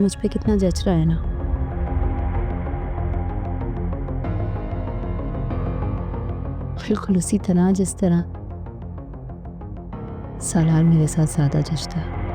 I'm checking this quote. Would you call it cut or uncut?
uncut